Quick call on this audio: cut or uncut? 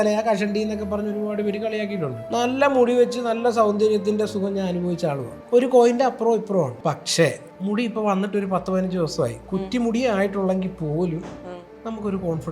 cut